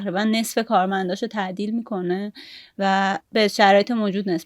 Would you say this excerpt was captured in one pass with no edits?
no; 1 cut; at 3.2 s

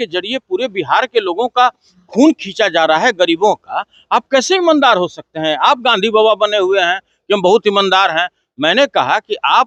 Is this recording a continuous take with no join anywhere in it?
yes; 0 cuts

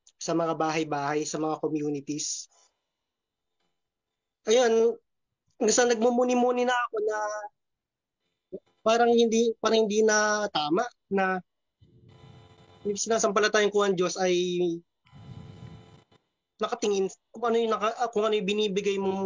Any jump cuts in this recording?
no; 0 cuts

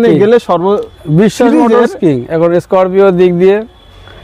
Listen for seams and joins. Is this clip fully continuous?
yes; 0 cuts

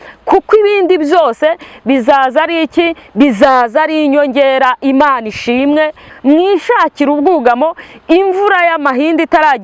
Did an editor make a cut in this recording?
yes; 1 cut; at 6.1 s

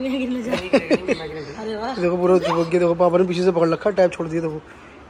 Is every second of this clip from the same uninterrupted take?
yes; 0 cuts

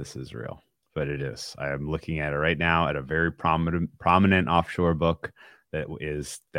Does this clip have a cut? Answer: no; 0 cuts

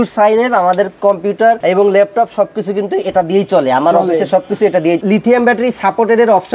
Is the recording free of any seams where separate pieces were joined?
no; 2 cuts; at 1.6 s, 5.0 s

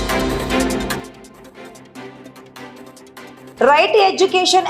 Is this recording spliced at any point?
yes; 2 cuts; at 1.0 s, 3.5 s

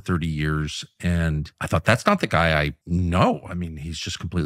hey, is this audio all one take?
no; 2 cuts; at 1.5 s, 2.8 s

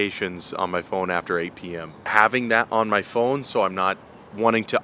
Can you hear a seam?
yes; 1 cut; at 2.1 s

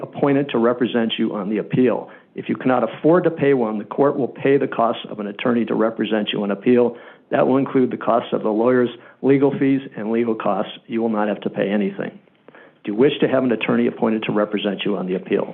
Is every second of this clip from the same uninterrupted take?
yes; 0 cuts

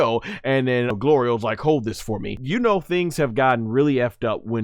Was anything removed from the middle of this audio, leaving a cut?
yes; 2 cuts; at 0.9 s, 2.4 s

